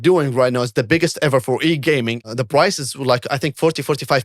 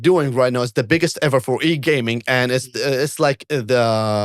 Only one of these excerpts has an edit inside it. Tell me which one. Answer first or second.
first